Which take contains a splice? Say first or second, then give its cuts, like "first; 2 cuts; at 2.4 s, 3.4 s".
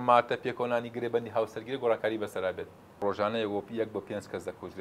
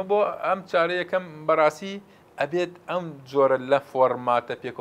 first; 1 cut; at 3.0 s